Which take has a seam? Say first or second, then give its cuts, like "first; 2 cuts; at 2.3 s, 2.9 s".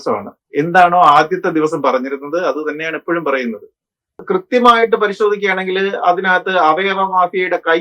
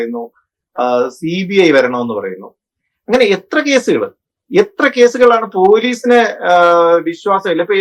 first; 1 cut; at 4.2 s